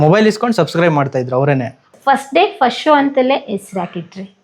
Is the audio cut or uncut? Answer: cut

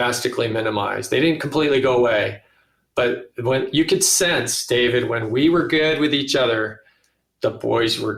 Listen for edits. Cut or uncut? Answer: uncut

